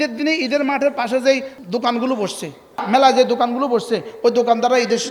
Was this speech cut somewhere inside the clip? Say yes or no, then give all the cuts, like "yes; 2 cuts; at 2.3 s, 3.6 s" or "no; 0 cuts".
yes; 2 cuts; at 1.6 s, 2.8 s